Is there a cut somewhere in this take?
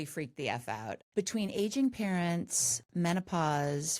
yes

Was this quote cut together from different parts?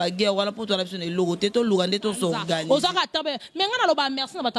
yes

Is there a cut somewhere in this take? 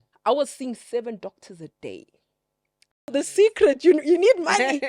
yes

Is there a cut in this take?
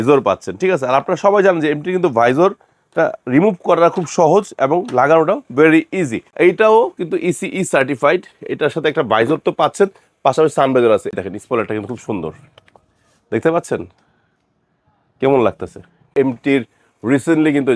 yes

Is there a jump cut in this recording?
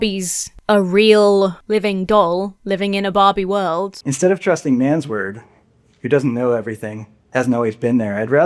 yes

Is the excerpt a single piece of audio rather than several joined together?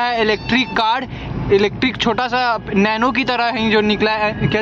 yes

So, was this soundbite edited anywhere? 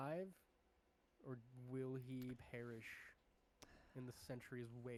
no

